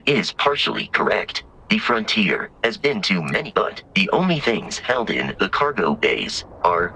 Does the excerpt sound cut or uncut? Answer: cut